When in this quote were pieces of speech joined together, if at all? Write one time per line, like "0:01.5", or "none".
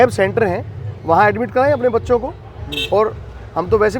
none